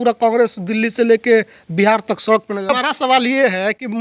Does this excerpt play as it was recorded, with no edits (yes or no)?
no